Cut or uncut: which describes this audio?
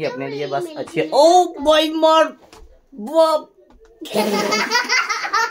cut